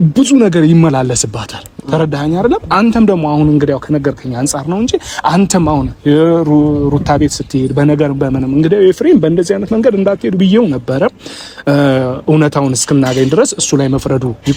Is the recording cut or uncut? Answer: uncut